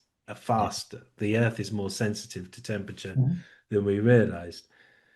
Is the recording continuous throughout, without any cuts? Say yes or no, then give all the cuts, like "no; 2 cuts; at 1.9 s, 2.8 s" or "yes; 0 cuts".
yes; 0 cuts